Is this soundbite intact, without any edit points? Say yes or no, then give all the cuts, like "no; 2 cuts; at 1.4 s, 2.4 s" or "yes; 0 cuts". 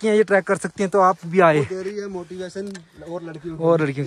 no; 1 cut; at 1.7 s